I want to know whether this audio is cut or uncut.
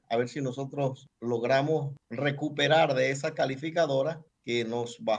cut